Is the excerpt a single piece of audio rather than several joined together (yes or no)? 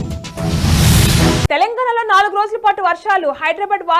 no